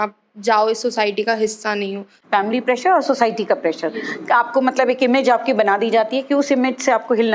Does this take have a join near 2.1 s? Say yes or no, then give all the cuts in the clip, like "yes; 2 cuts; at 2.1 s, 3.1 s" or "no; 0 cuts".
yes; 1 cut; at 2.1 s